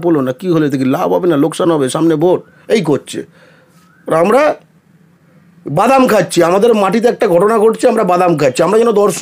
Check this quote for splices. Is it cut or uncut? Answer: uncut